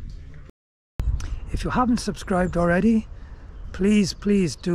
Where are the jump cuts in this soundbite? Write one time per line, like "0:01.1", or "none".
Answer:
0:01.0